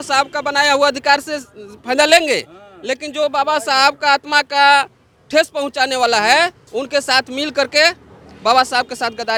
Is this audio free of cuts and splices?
yes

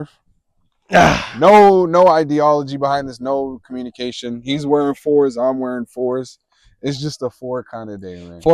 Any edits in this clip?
no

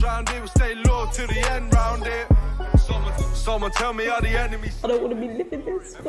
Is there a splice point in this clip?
no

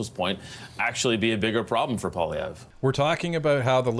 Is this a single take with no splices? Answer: no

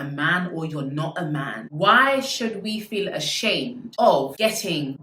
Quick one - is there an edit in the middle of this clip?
yes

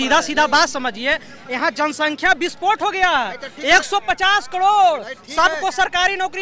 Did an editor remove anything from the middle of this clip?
no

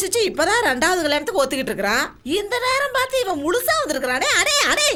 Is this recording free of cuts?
yes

